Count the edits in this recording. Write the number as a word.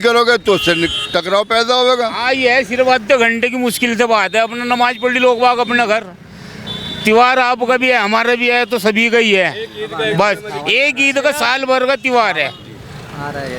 zero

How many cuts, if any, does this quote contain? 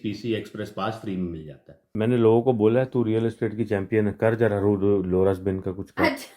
one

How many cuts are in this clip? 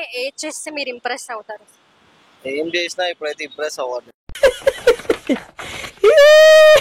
zero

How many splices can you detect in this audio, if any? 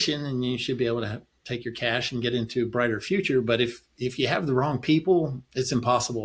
zero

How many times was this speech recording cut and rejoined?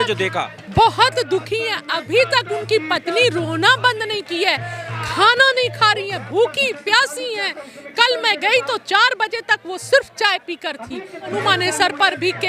one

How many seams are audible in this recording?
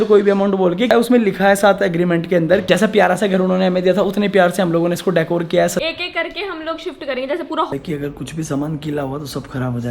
four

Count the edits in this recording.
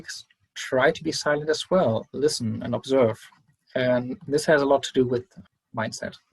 one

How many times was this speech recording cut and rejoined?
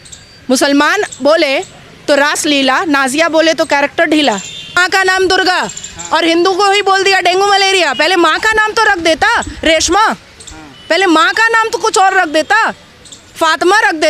one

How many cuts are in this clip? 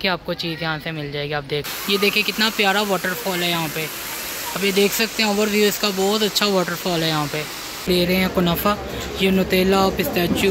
two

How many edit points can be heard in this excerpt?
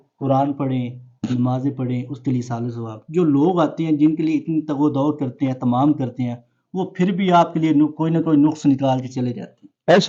zero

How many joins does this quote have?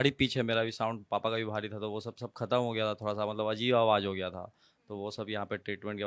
zero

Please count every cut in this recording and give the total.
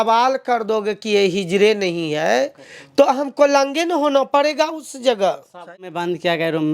one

